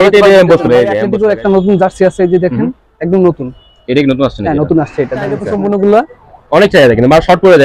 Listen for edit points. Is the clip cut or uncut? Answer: cut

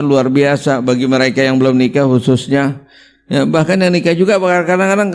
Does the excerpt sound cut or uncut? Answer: uncut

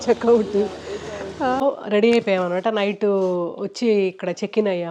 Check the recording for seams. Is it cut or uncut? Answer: cut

